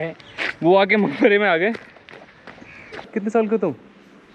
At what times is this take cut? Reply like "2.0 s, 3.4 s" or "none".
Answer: 3.1 s

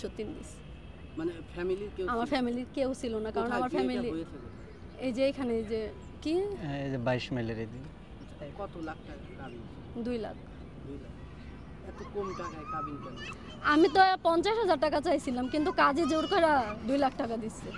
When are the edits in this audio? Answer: none

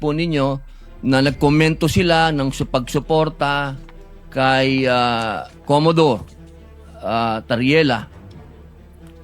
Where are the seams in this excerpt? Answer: 8.1 s

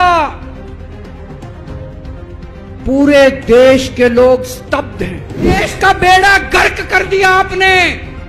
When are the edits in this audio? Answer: 5.6 s

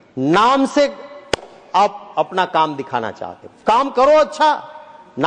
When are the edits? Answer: none

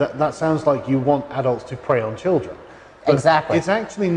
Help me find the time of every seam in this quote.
none

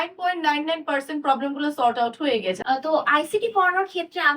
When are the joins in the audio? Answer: 2.6 s

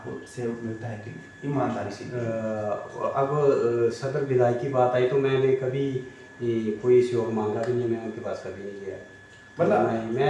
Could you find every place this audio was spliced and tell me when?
none

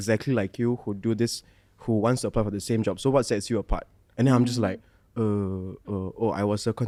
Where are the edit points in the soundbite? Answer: none

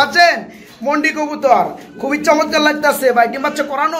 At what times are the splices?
none

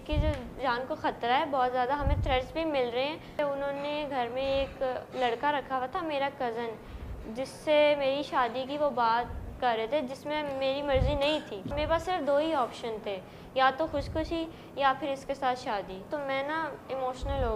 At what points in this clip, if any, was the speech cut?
3.4 s, 11.7 s, 16.1 s

